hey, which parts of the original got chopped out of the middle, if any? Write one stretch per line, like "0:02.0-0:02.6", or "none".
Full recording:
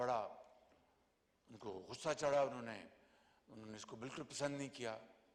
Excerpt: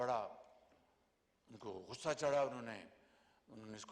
none